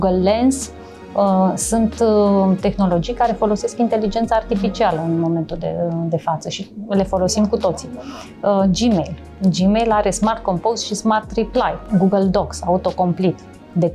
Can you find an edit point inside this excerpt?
yes; 1 cut; at 11.8 s

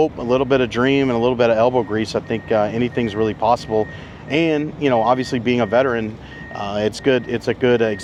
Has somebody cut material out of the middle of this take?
no; 0 cuts

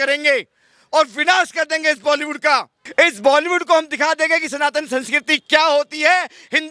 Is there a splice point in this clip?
yes; 1 cut; at 2.8 s

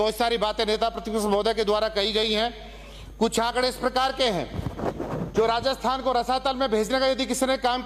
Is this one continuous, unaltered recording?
yes; 0 cuts

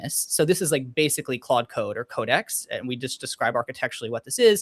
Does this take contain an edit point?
no; 0 cuts

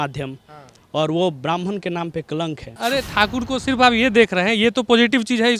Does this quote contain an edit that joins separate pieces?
yes; 1 cut; at 2.7 s

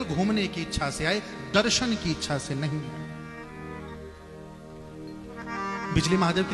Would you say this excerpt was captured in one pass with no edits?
yes; 0 cuts

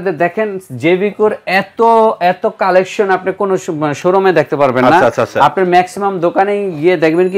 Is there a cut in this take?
no; 0 cuts

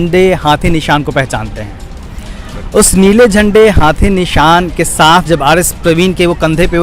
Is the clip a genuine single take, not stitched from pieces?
yes; 0 cuts

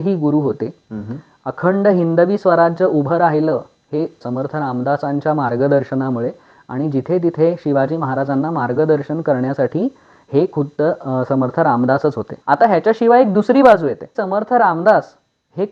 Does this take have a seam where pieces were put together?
yes; 3 cuts; at 4.2 s, 12.3 s, 14.1 s

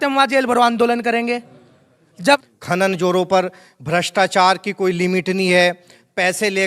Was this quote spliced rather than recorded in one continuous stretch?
yes; 1 cut; at 2.4 s

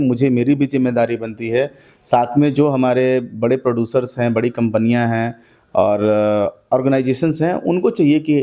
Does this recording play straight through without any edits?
yes; 0 cuts

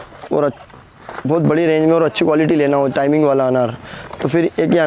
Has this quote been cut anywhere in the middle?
no; 0 cuts

